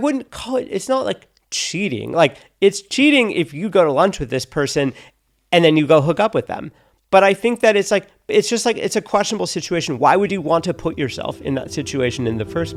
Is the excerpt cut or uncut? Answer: uncut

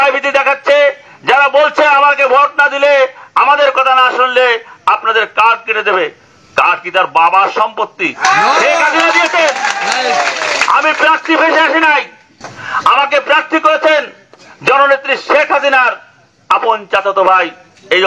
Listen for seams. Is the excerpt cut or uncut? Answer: uncut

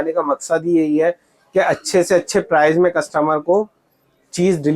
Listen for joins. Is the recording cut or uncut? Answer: uncut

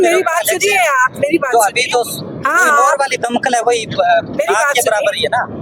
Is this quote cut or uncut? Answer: uncut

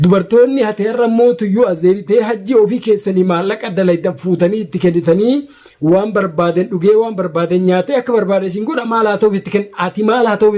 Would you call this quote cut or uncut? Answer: uncut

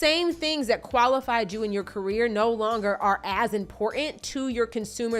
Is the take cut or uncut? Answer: uncut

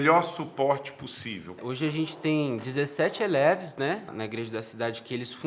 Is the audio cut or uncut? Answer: cut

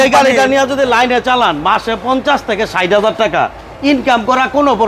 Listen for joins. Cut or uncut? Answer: uncut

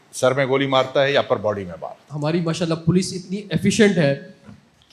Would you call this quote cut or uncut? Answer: cut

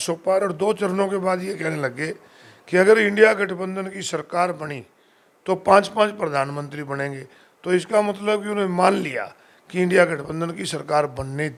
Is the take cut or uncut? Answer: uncut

